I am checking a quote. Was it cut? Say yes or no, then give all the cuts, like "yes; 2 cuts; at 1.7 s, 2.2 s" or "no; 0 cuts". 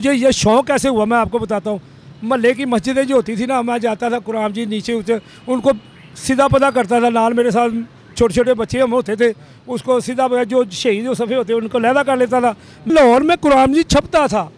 yes; 1 cut; at 12.8 s